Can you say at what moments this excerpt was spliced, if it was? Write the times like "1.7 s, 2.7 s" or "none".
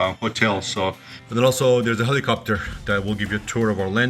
1.1 s